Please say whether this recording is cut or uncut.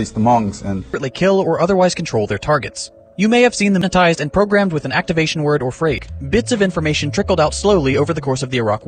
cut